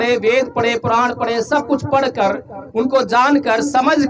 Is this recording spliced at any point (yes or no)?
no